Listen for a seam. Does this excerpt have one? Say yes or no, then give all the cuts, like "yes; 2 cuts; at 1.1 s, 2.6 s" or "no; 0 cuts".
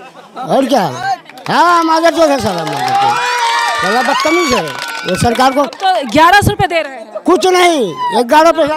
no; 0 cuts